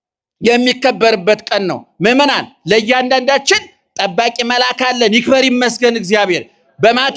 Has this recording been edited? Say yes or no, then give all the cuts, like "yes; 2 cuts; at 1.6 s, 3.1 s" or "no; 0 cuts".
no; 0 cuts